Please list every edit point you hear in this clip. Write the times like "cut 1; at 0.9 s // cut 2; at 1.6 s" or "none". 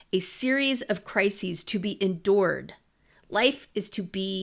none